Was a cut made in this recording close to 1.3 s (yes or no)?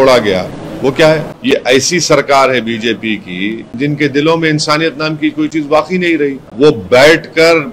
yes